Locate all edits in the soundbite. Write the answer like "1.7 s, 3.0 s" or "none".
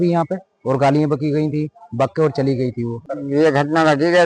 3.0 s